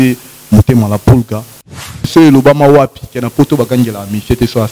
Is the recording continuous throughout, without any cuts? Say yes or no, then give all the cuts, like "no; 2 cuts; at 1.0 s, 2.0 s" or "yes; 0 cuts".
no; 1 cut; at 1.8 s